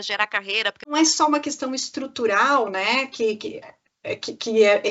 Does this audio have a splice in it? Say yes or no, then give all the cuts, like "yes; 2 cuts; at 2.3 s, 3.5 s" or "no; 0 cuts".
yes; 1 cut; at 0.9 s